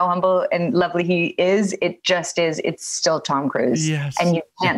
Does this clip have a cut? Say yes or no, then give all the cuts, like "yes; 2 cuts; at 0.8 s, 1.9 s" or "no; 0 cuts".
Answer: no; 0 cuts